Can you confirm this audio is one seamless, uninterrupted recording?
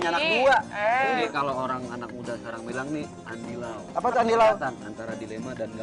no; 1 cut; at 1.2 s

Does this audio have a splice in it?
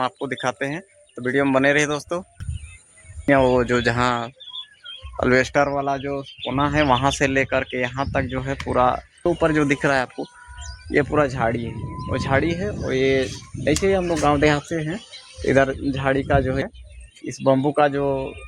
yes; 3 cuts; at 3.3 s, 9.2 s, 16.6 s

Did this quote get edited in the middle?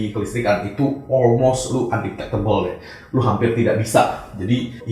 no; 0 cuts

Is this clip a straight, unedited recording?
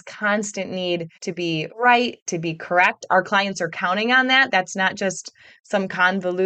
no; 1 cut; at 1.4 s

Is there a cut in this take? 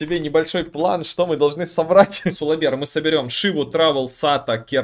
yes; 1 cut; at 2.4 s

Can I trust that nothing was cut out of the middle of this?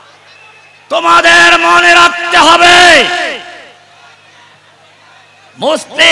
yes; 0 cuts

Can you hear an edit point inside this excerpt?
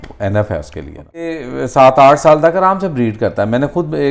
yes; 1 cut; at 1.3 s

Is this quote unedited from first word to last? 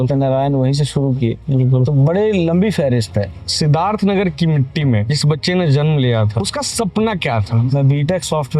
no; 4 cuts; at 3.4 s, 5.1 s, 6.4 s, 7.7 s

